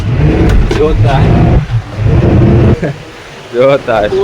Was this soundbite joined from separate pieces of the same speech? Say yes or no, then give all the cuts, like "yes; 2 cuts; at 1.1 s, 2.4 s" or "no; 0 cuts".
yes; 1 cut; at 2.7 s